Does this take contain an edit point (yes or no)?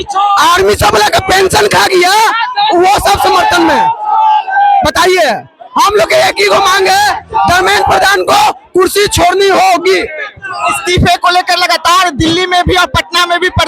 no